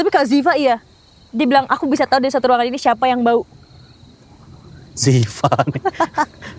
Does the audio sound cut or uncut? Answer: uncut